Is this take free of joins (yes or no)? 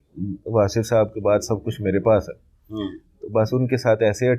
yes